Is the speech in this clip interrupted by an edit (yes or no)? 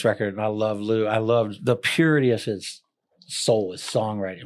yes